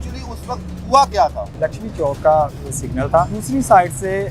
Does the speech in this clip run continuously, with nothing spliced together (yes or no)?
no